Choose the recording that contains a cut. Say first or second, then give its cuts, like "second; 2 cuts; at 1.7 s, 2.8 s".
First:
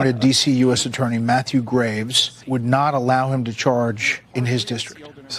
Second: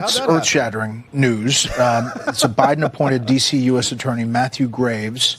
second; 1 cut; at 1.0 s